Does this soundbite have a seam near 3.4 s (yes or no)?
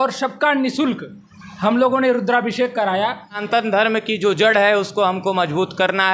yes